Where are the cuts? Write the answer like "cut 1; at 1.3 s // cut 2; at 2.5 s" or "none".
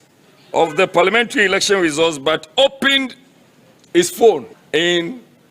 cut 1; at 4.6 s